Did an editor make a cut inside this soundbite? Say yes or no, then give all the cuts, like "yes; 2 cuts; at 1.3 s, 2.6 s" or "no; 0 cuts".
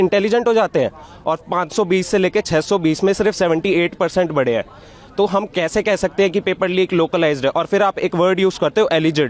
no; 0 cuts